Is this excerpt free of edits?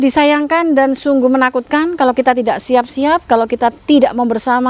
yes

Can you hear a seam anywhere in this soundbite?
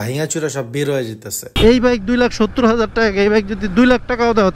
yes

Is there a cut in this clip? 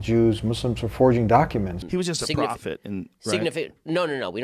yes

